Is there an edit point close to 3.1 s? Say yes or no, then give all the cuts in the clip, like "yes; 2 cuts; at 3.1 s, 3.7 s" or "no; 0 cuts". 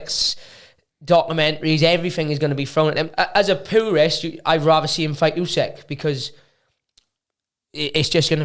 yes; 1 cut; at 3.1 s